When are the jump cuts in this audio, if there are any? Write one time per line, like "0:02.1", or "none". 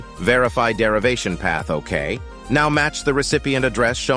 0:02.3